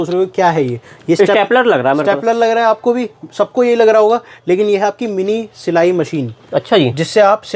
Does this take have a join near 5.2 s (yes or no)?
no